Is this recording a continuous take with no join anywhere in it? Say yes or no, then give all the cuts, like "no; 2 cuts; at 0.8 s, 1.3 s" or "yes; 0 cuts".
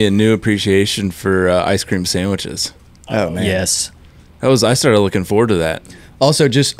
yes; 0 cuts